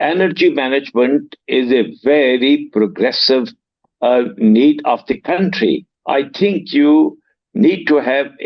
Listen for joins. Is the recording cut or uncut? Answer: cut